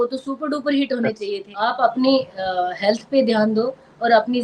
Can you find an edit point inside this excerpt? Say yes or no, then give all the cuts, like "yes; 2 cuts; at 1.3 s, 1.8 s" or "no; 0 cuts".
yes; 1 cut; at 1.5 s